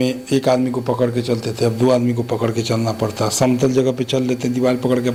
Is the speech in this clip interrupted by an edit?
no; 0 cuts

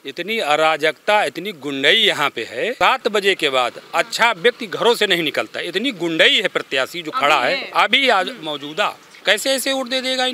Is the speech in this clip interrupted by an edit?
yes; 2 cuts; at 2.7 s, 9.1 s

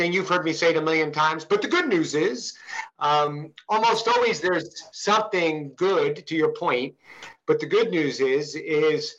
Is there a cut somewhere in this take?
no; 0 cuts

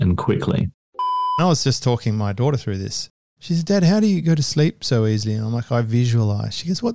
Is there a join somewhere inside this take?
yes; 2 cuts; at 1.3 s, 4.2 s

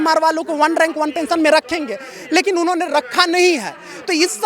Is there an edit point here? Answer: no; 0 cuts

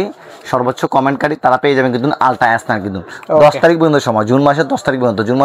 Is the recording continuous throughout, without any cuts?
yes; 0 cuts

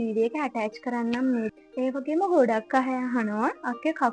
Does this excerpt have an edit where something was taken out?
yes; 1 cut; at 1.6 s

